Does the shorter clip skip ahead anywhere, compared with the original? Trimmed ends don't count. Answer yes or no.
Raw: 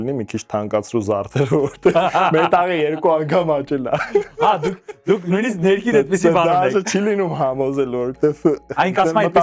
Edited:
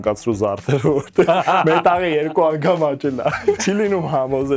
yes